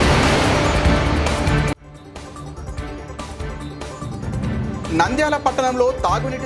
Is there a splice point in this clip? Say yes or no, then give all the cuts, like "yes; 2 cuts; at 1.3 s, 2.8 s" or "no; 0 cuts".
no; 0 cuts